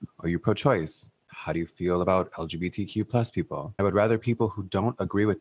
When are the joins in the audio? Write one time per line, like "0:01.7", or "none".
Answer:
0:03.7

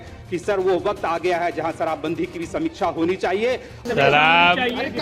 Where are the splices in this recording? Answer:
0:03.8

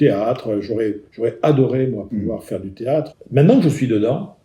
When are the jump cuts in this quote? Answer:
0:03.2

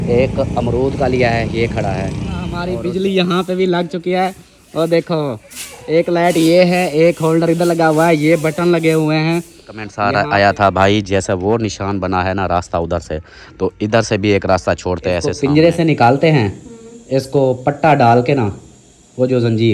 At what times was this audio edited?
0:02.6
0:09.9
0:15.3

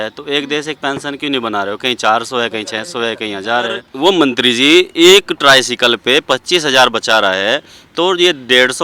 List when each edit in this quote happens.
0:03.9

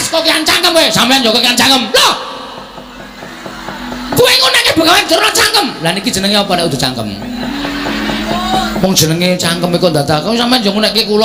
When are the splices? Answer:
none

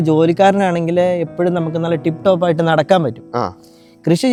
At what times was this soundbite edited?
none

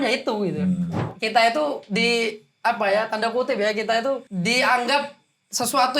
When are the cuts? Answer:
0:01.1
0:04.3

